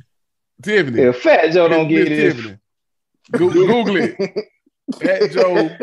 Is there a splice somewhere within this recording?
no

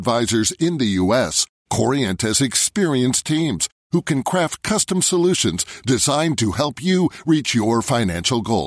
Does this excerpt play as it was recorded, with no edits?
yes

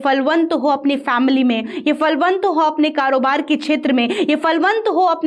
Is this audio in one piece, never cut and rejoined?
yes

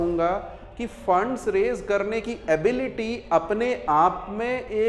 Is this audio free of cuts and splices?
yes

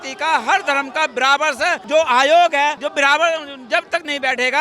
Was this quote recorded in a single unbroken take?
no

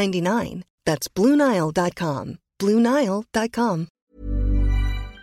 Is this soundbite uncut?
no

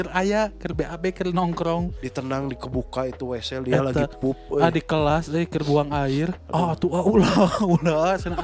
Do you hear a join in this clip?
yes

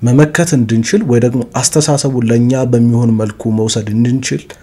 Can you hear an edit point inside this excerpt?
no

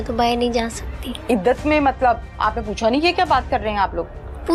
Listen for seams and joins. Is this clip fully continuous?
yes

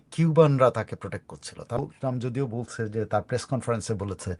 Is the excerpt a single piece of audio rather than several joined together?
no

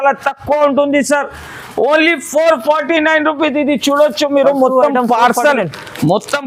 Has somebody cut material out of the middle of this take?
no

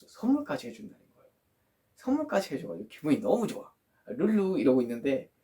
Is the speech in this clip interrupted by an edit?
no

